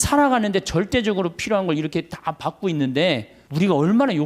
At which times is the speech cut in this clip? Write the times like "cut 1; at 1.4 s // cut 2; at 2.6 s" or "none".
cut 1; at 3.4 s